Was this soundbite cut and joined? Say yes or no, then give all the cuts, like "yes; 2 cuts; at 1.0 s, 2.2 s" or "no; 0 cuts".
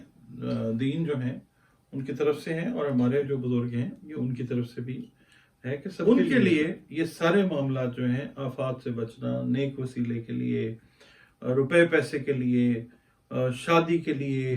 yes; 1 cut; at 6.1 s